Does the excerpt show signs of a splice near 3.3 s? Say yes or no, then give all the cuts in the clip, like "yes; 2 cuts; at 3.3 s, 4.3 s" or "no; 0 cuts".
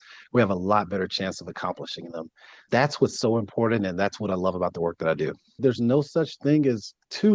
no; 1 cut; at 5.6 s